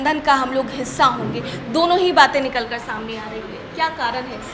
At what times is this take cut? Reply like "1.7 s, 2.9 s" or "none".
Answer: none